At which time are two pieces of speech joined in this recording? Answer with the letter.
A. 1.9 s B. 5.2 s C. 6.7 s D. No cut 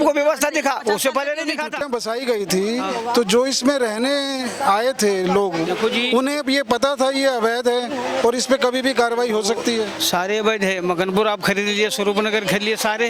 A